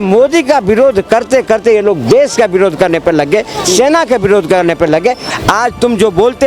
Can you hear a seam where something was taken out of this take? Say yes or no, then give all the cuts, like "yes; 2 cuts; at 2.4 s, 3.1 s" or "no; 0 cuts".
yes; 1 cut; at 5.2 s